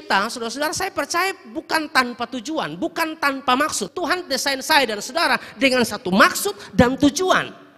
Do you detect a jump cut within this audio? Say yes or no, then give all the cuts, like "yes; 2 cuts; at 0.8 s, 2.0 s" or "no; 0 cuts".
yes; 1 cut; at 3.9 s